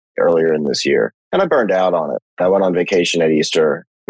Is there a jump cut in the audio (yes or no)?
yes